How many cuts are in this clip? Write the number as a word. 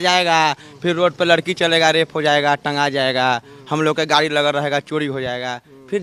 zero